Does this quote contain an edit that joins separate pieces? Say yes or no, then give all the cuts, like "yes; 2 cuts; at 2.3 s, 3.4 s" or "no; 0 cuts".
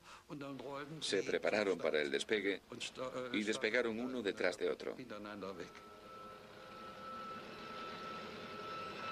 yes; 1 cut; at 6.3 s